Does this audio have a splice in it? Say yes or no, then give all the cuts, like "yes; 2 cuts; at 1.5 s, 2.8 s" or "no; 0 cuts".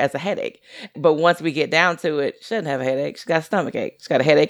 yes; 1 cut; at 0.9 s